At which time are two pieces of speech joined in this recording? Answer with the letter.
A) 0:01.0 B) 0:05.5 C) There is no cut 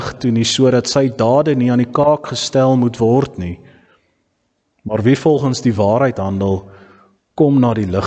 B